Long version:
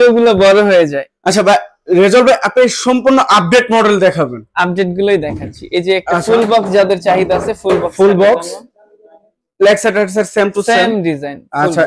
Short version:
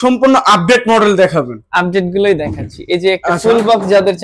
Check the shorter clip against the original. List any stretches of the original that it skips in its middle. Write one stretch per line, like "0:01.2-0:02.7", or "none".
none